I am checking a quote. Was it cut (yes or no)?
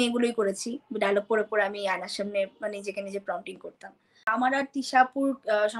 yes